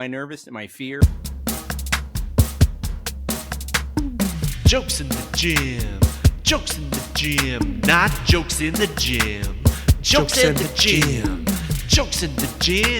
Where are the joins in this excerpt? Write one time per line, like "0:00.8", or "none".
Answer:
0:01.0